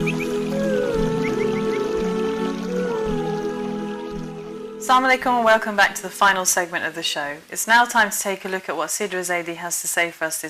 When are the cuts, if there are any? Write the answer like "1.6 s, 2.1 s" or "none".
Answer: 4.4 s